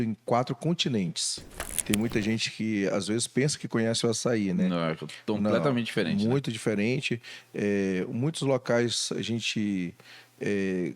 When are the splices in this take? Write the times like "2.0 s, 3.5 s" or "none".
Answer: 1.8 s